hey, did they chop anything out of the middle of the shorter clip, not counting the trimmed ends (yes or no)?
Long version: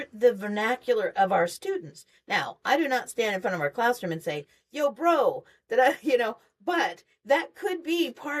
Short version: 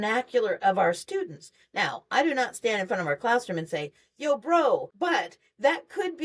yes